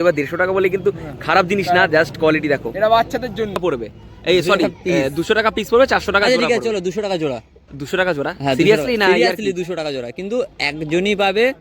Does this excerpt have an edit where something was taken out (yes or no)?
yes